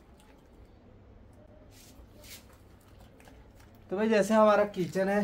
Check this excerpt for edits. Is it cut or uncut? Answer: uncut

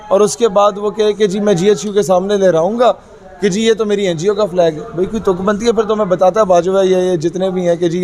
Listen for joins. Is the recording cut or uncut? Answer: uncut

